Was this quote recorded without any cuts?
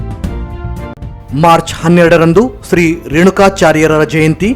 yes; 0 cuts

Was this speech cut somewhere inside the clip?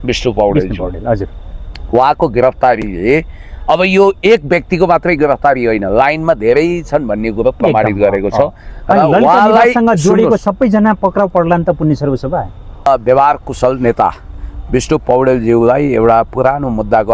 yes; 1 cut; at 12.9 s

